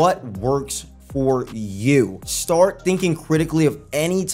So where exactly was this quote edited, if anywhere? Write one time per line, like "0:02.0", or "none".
0:02.2